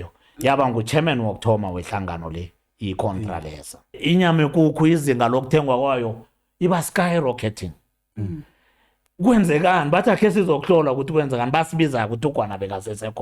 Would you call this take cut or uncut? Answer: cut